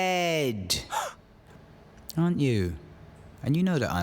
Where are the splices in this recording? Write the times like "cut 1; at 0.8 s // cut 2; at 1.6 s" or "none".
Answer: cut 1; at 1.2 s

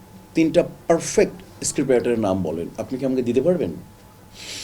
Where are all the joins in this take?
none

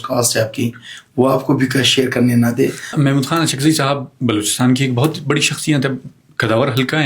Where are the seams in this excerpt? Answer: cut 1; at 2.9 s

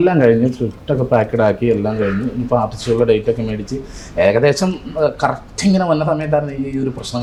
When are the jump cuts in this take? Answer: none

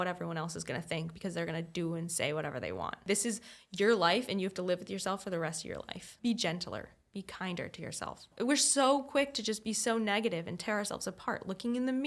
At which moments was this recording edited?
cut 1; at 3.0 s // cut 2; at 6.1 s // cut 3; at 8.3 s

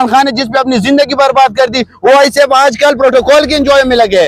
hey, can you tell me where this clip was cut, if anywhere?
none

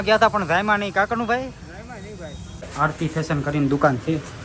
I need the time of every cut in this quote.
cut 1; at 2.6 s

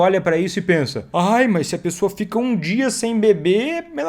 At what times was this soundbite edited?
cut 1; at 1.0 s

